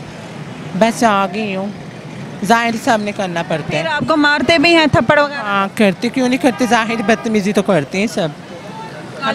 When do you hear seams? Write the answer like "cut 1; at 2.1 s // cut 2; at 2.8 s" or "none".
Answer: cut 1; at 4.0 s